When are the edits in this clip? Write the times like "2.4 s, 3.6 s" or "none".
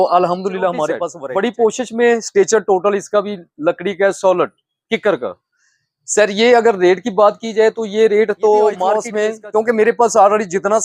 1.1 s, 9.1 s

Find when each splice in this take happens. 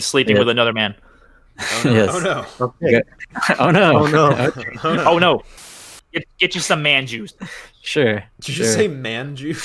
5.7 s

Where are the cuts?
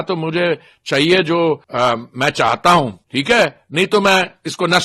1.7 s, 3.1 s

